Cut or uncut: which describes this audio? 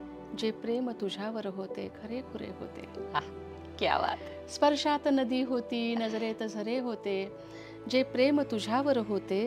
uncut